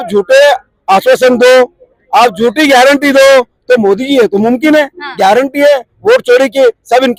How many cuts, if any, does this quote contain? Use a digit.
0